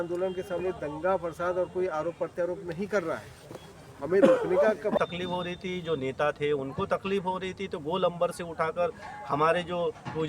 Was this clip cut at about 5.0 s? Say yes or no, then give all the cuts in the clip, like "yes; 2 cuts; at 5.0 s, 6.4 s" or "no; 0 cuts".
yes; 1 cut; at 5.0 s